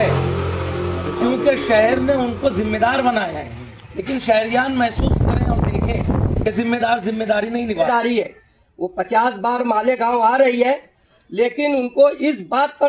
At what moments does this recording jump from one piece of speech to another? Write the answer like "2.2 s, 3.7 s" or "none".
7.9 s